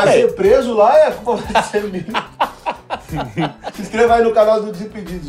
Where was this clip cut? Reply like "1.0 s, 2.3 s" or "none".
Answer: 3.6 s